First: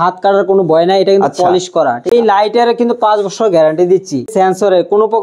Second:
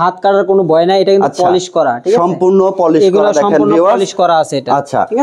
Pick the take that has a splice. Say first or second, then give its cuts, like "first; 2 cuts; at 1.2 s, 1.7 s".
first; 2 cuts; at 2.1 s, 4.3 s